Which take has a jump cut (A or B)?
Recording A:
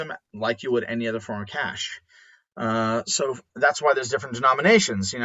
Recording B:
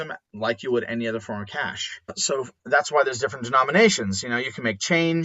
B